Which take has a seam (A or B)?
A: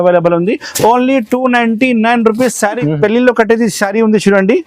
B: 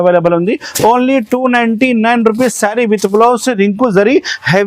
A